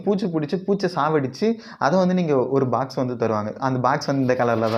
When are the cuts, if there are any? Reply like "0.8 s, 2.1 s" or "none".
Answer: none